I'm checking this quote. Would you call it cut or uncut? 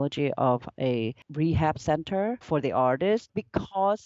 cut